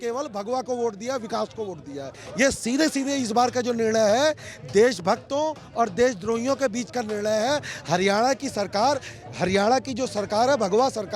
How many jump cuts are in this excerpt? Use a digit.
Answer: 1